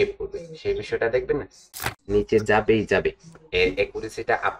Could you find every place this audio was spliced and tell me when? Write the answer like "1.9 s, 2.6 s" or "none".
1.7 s